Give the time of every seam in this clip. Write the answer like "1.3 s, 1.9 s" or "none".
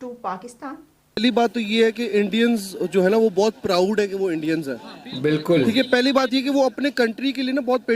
1.2 s

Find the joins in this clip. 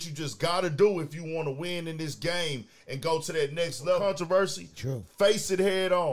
4.0 s

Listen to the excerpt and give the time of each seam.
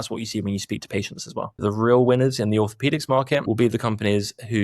1.6 s, 3.4 s

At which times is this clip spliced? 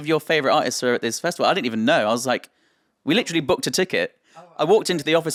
none

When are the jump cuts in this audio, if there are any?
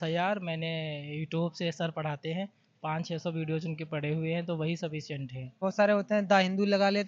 5.6 s

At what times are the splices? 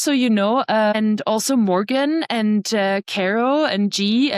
0.9 s

